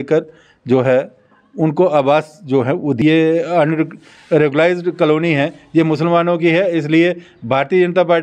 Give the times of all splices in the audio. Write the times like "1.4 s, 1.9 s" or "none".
3.0 s